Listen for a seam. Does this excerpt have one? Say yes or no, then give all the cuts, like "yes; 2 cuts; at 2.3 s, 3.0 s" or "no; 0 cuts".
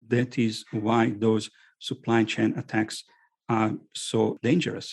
no; 0 cuts